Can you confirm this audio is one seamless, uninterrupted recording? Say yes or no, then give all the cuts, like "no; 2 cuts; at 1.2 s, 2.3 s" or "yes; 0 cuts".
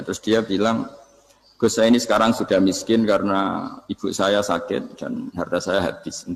yes; 0 cuts